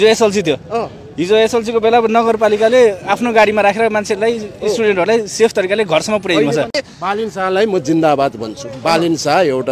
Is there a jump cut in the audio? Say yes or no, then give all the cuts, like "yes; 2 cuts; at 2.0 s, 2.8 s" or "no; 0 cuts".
yes; 1 cut; at 6.9 s